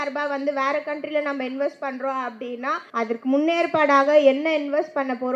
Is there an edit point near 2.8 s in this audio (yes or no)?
yes